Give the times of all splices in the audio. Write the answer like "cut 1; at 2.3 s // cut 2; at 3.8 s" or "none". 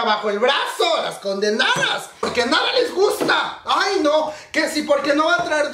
cut 1; at 2.3 s